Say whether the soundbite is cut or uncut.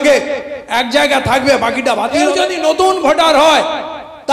cut